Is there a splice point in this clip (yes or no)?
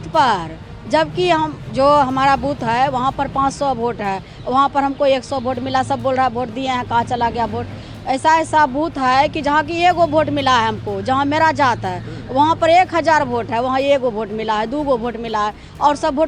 no